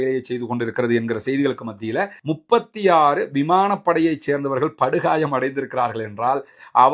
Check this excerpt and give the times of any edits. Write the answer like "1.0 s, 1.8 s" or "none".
2.2 s